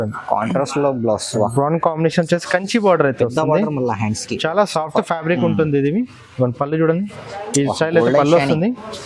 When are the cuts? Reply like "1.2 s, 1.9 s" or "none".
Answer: none